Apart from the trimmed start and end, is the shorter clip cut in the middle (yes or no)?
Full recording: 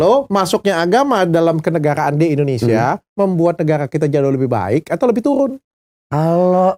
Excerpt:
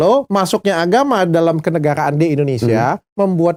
no